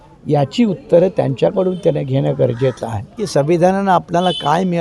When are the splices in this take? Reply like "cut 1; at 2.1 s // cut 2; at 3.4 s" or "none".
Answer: cut 1; at 3.2 s